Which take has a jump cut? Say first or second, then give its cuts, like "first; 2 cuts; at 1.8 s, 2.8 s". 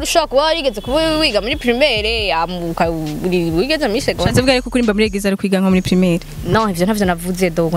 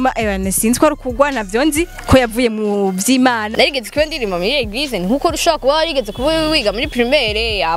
second; 1 cut; at 3.5 s